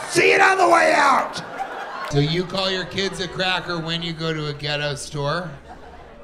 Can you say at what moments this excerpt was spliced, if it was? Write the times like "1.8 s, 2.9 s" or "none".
2.1 s